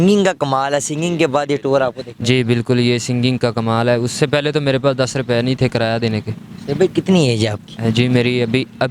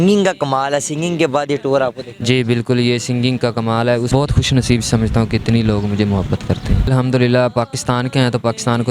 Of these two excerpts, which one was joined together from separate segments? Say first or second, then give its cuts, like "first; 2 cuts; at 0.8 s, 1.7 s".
second; 2 cuts; at 4.1 s, 6.9 s